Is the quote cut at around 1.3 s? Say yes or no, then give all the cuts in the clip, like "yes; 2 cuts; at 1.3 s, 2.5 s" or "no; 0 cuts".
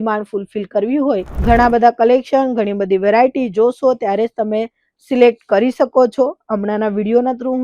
yes; 1 cut; at 1.3 s